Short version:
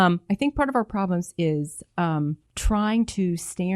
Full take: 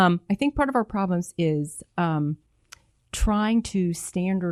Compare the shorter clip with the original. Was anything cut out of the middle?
yes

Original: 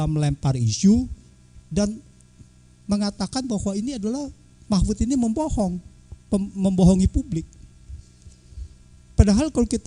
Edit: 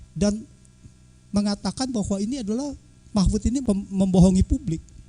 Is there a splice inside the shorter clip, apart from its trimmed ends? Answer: yes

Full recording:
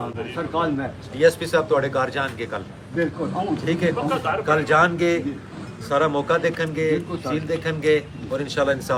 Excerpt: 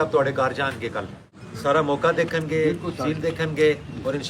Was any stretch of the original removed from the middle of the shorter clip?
yes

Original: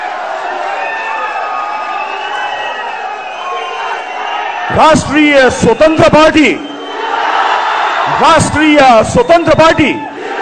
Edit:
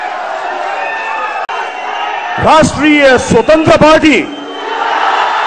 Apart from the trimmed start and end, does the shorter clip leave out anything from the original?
yes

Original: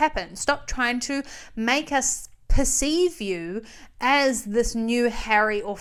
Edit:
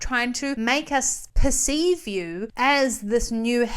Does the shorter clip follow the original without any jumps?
no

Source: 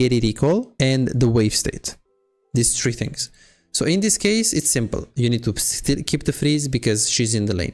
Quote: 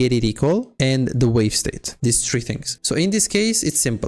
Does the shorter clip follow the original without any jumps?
no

